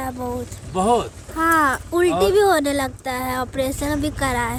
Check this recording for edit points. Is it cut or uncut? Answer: uncut